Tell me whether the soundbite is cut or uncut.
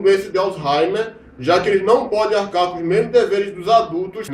cut